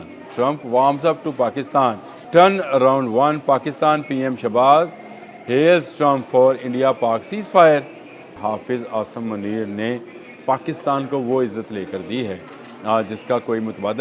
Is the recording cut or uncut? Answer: cut